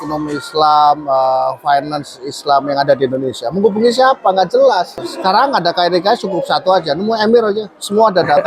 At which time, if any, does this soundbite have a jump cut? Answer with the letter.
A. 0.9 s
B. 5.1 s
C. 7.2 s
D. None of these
B